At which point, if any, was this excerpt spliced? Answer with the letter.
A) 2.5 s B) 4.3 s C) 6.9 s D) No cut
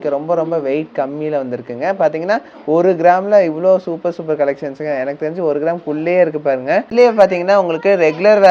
C